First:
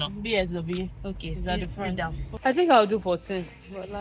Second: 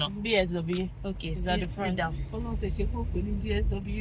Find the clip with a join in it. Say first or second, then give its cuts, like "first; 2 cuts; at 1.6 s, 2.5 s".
first; 1 cut; at 2.3 s